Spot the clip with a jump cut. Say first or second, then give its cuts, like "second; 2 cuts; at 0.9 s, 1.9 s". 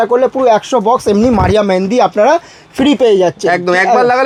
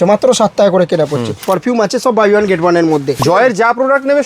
second; 2 cuts; at 1.3 s, 3.2 s